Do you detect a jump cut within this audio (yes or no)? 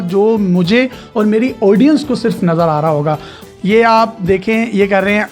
yes